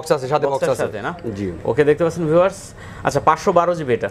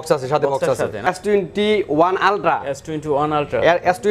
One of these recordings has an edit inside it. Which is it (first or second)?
second